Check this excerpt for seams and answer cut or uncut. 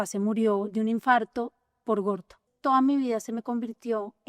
cut